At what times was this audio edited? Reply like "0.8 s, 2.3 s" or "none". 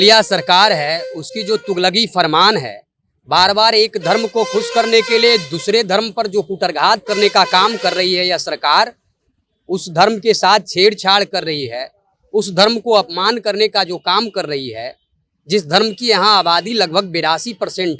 none